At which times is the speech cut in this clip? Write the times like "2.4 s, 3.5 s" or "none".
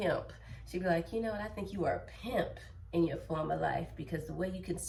none